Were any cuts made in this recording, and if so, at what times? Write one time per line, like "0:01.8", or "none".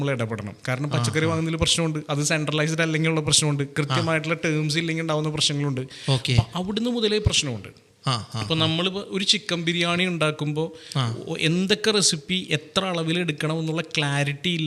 none